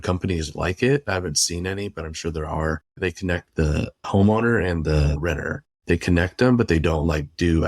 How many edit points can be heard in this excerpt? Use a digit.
3